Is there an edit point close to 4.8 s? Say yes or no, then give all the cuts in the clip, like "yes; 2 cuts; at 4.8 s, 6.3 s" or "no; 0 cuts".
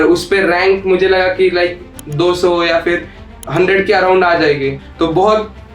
yes; 1 cut; at 4.8 s